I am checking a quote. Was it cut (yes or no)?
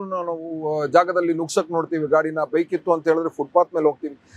no